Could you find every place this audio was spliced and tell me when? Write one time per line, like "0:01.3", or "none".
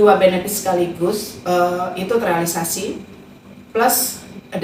none